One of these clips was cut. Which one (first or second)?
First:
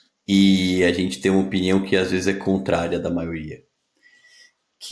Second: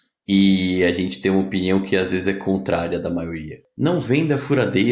second